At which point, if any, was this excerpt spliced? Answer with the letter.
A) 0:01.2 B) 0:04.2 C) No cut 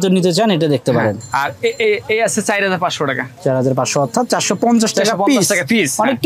A